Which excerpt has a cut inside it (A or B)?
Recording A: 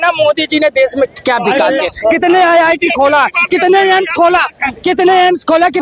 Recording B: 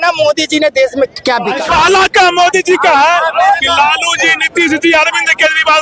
B